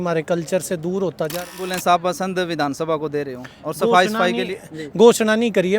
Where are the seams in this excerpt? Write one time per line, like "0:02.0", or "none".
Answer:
0:01.6